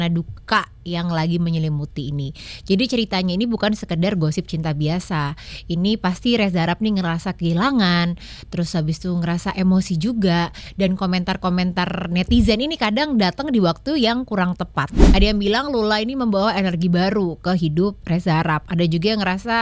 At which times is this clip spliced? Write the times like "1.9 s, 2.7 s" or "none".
15.0 s